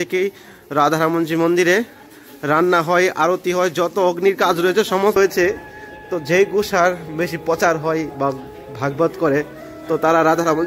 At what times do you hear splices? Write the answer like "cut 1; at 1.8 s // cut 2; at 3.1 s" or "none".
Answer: cut 1; at 5.2 s